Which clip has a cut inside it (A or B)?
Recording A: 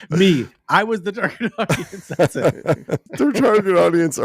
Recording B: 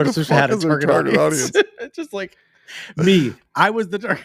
A